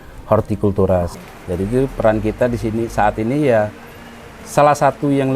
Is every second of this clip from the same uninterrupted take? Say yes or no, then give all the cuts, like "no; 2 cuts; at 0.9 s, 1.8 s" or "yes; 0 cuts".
no; 1 cut; at 1.1 s